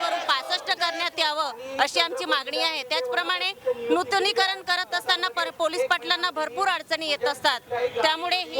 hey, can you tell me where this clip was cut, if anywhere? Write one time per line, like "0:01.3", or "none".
none